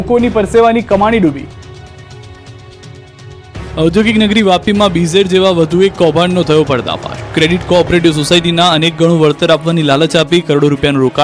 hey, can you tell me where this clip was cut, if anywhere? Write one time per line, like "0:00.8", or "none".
none

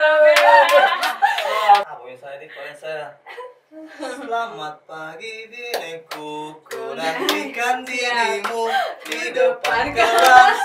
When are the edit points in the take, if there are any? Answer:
0:01.8

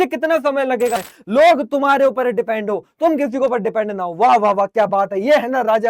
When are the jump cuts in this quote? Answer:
0:01.0

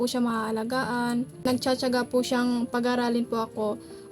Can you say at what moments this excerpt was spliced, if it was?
0:01.5

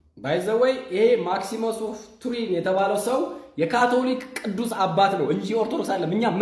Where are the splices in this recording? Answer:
none

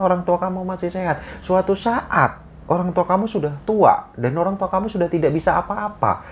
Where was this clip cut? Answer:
none

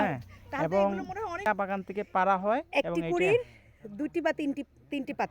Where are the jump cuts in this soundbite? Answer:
0:01.5

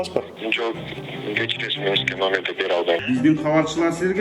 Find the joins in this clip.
0:03.0

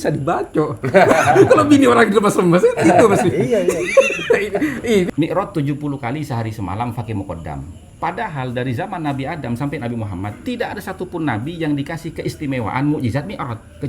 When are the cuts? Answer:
0:05.1
0:07.8

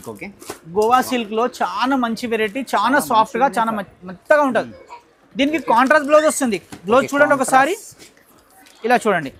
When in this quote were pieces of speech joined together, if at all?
none

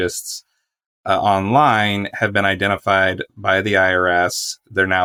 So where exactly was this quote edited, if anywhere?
none

